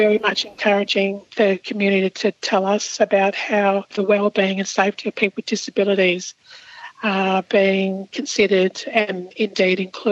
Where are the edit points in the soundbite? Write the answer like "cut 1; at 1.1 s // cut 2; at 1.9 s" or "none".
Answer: none